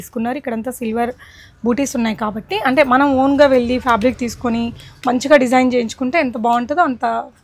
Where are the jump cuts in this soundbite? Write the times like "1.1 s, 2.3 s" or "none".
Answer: none